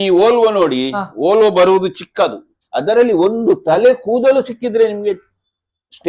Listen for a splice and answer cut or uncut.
cut